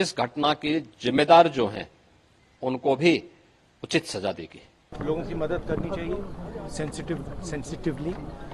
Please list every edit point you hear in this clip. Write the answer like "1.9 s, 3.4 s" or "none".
4.9 s